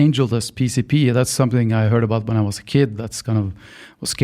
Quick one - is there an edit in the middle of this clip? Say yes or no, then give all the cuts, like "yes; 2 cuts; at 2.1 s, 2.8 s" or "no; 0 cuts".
no; 0 cuts